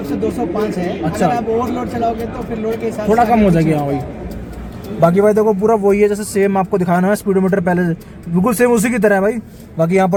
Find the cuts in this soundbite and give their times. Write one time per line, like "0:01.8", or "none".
none